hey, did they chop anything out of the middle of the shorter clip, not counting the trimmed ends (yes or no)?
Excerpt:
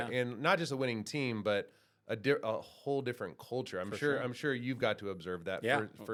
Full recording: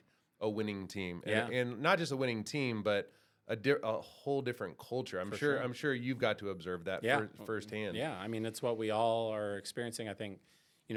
no